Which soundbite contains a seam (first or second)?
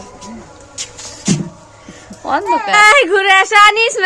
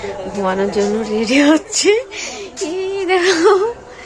first